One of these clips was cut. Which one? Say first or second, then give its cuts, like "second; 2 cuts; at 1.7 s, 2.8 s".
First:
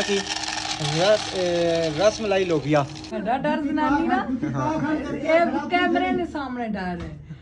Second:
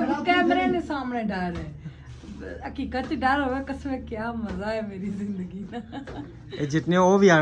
first; 1 cut; at 3.0 s